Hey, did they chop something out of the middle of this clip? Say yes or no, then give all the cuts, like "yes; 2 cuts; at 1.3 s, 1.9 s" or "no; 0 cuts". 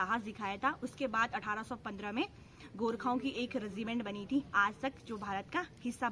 no; 0 cuts